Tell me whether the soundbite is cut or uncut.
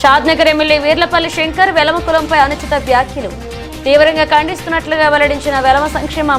uncut